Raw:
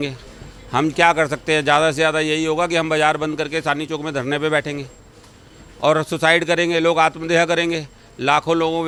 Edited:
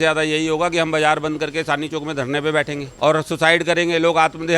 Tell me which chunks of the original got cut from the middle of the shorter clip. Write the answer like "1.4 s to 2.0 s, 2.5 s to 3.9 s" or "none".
4.8 s to 5.6 s